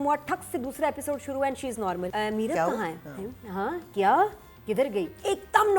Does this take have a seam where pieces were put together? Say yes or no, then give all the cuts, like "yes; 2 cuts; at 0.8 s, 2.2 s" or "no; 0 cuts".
yes; 1 cut; at 2.1 s